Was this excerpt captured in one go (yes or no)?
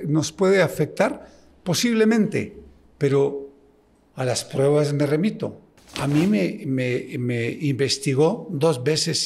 yes